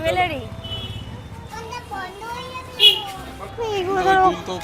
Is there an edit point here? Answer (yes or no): yes